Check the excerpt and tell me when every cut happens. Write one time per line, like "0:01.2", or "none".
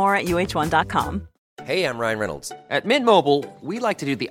0:01.3